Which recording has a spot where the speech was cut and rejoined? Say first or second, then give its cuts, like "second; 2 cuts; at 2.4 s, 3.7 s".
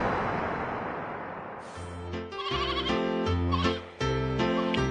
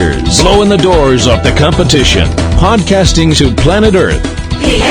first; 1 cut; at 1.9 s